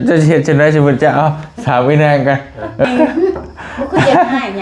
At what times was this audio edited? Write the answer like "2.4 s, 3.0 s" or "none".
2.8 s